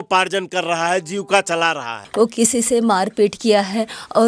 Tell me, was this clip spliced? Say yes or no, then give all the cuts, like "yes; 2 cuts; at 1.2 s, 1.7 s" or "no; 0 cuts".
yes; 1 cut; at 2.0 s